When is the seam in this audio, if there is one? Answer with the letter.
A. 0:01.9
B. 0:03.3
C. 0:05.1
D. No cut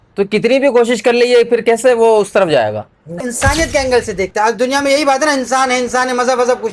B